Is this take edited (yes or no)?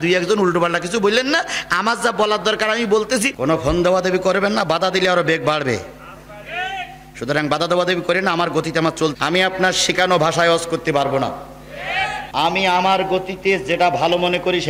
yes